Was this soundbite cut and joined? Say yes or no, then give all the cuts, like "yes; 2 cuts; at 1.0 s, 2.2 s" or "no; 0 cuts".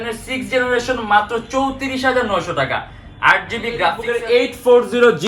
yes; 1 cut; at 4.0 s